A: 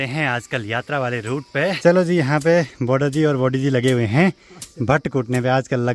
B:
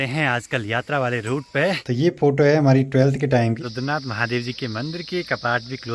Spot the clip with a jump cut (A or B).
B